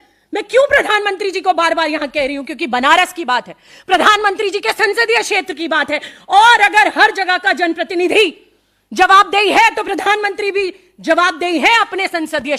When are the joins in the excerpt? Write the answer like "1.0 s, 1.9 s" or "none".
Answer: none